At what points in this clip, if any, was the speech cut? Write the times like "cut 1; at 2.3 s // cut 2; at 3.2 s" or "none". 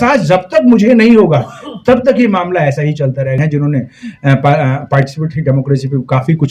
cut 1; at 3.4 s